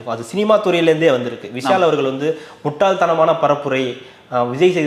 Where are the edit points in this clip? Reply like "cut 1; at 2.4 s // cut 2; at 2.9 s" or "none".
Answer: none